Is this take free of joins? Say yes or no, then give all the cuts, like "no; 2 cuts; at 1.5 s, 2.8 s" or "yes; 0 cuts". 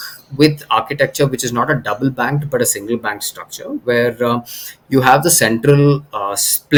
yes; 0 cuts